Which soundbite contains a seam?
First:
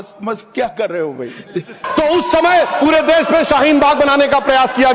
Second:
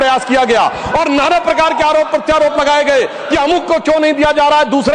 first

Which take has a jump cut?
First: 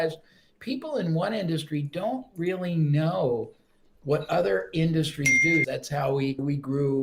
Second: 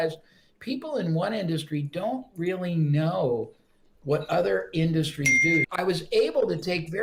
first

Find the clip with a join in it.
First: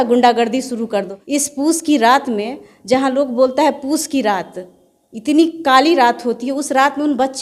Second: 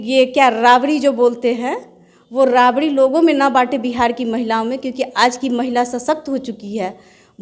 first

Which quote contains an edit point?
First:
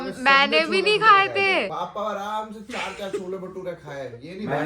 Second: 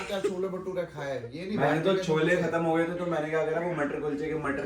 first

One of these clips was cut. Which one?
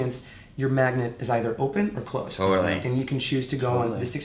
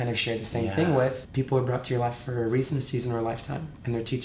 second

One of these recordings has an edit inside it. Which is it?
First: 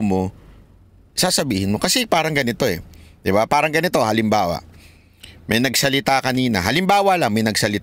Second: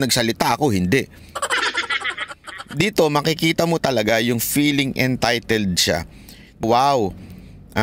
second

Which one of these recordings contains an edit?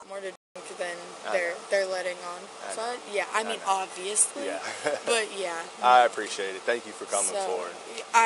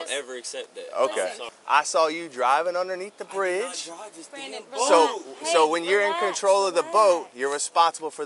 second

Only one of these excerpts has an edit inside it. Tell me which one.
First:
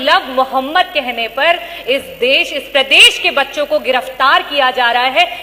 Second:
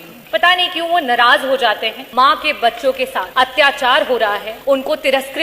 second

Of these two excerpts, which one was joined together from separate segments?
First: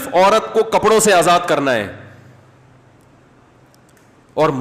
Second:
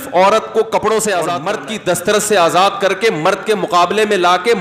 second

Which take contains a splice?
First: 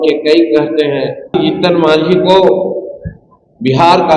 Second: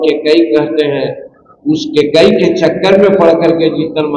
first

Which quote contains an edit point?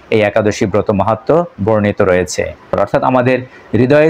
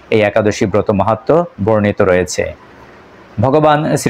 first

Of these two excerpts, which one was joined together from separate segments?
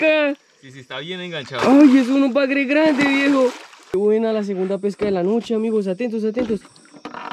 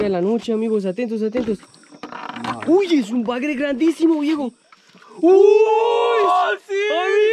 first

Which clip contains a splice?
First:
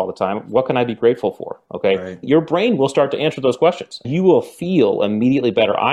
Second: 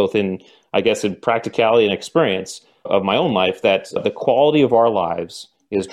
first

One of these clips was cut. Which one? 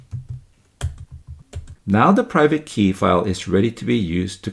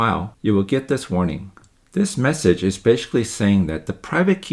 first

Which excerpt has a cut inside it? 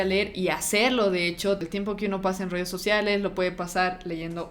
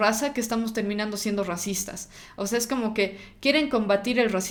first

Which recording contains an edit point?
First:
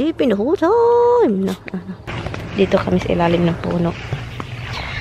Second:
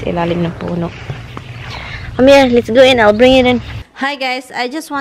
second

